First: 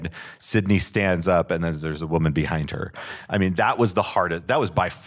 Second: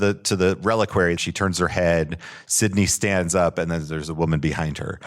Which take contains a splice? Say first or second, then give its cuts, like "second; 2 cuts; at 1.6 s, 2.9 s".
second; 1 cut; at 1.2 s